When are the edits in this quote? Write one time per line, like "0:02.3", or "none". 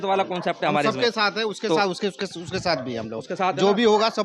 none